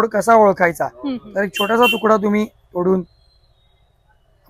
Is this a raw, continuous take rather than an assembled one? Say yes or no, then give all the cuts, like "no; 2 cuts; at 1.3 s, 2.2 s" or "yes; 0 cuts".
yes; 0 cuts